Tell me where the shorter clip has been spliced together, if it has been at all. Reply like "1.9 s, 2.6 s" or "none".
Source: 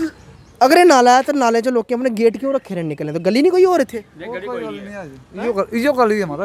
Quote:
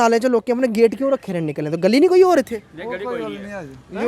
none